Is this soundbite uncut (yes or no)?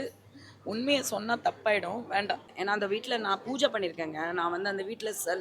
no